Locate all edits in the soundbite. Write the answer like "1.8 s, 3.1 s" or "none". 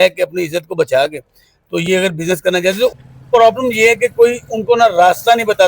2.9 s